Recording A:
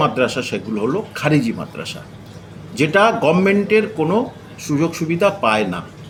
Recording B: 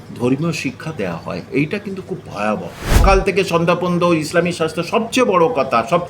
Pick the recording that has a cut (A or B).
B